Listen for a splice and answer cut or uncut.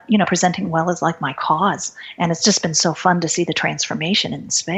uncut